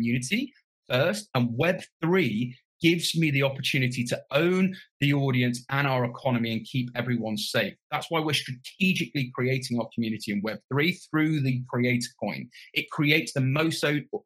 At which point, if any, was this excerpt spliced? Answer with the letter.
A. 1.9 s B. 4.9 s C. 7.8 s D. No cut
C